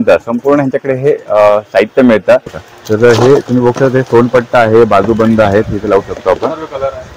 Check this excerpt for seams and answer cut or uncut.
cut